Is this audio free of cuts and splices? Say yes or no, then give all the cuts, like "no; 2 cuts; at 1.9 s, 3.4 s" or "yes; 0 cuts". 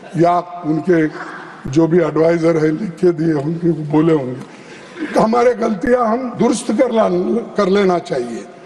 yes; 0 cuts